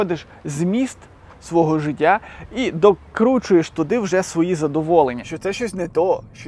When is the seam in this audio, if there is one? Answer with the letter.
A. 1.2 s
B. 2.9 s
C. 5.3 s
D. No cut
C